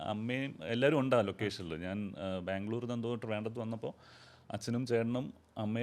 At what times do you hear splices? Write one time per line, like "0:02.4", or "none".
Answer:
none